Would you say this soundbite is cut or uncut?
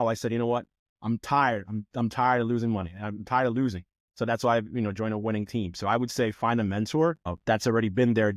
cut